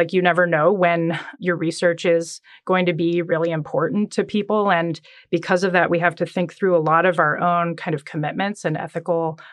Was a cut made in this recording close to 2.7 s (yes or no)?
no